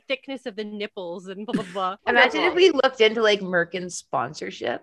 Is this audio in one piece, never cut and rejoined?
no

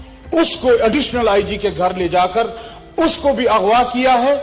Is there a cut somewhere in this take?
no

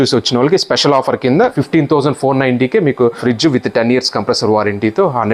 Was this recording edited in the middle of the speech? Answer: yes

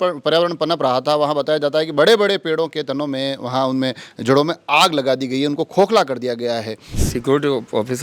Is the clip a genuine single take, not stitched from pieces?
no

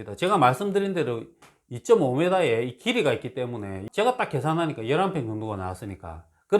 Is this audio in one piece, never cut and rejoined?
no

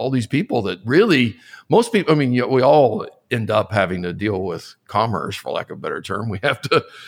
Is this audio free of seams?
yes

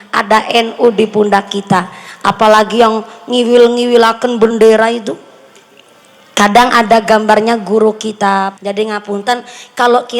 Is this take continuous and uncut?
no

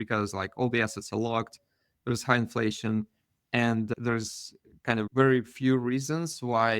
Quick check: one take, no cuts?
no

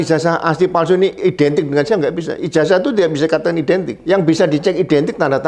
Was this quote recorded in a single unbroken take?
no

